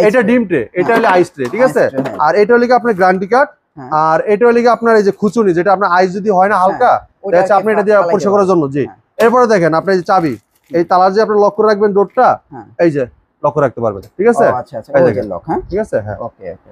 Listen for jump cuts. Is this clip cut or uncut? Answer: uncut